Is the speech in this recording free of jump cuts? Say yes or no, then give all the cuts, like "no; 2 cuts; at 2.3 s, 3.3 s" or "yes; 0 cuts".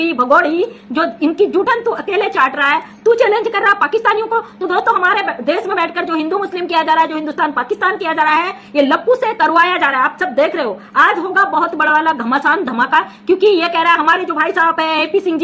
yes; 0 cuts